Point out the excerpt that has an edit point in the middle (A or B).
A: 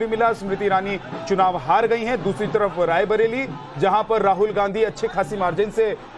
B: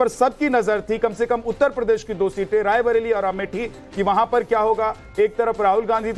A